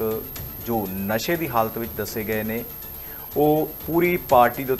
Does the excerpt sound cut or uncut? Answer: uncut